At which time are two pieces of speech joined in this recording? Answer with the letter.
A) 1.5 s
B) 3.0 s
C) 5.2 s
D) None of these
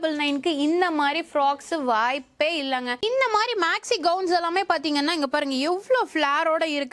B